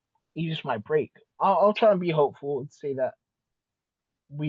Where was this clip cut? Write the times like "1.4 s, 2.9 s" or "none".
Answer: 1.2 s